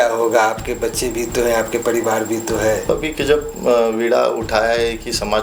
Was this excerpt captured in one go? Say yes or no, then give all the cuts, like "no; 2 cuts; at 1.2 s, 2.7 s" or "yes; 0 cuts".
no; 1 cut; at 2.9 s